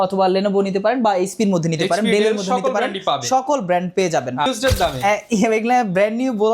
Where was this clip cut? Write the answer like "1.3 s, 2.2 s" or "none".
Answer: 4.5 s